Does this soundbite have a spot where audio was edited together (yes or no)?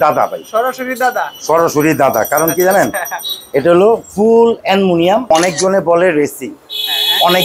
yes